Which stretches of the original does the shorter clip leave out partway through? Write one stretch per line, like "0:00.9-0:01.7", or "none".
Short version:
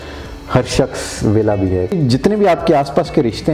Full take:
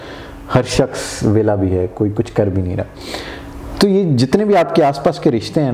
0:01.9-0:04.0